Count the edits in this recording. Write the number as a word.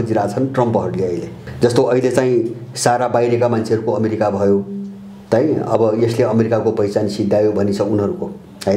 one